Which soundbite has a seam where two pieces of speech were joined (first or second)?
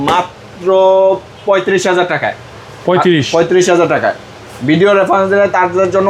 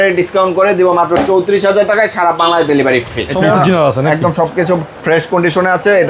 second